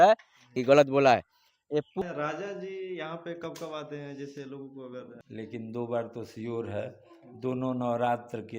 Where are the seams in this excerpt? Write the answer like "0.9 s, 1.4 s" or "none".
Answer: 2.0 s, 5.2 s